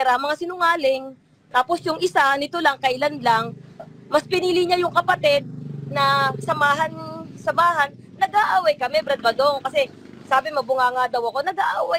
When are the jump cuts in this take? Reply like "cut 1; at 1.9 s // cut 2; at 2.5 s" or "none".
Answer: none